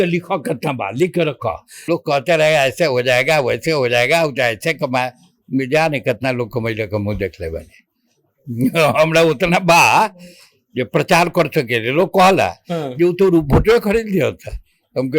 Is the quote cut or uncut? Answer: cut